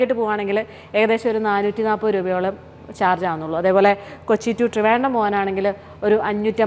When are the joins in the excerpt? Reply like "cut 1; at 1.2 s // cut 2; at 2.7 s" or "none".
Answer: none